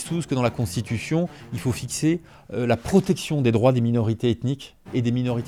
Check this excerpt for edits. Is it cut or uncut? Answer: uncut